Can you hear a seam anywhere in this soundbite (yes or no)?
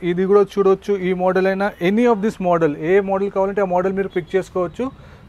no